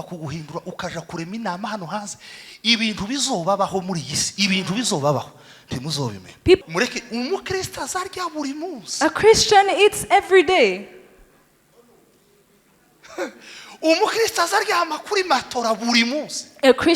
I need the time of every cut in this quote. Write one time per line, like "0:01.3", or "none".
0:06.6